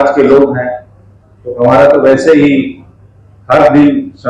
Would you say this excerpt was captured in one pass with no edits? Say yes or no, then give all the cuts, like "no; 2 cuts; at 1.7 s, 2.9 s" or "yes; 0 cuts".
yes; 0 cuts